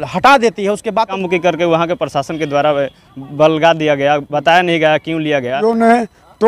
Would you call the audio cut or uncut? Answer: cut